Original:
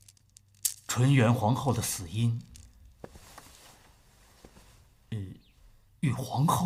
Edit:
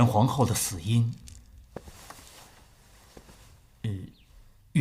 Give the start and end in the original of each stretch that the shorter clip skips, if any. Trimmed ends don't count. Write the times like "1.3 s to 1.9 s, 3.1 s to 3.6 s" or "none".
none